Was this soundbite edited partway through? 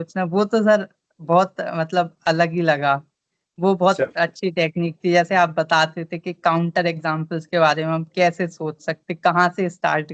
no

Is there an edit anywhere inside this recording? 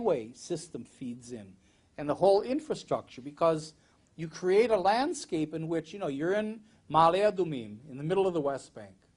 yes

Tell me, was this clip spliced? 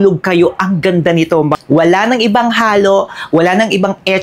yes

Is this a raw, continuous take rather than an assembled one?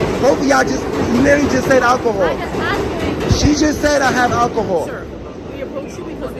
yes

